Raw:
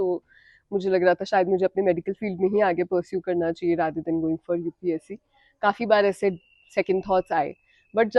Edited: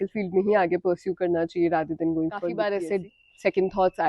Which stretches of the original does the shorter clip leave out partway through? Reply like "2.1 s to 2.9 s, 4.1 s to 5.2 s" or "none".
4.6 s to 5.9 s